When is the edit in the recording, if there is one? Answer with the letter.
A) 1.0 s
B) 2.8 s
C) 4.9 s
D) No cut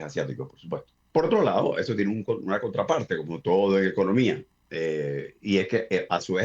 A